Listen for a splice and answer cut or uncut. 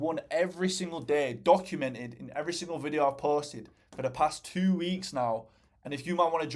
uncut